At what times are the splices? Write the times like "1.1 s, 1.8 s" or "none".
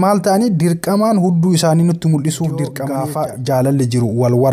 2.8 s